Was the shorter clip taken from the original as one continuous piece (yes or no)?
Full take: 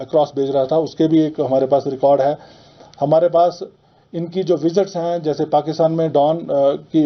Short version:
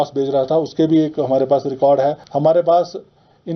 no